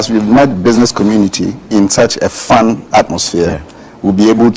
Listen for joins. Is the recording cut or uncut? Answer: cut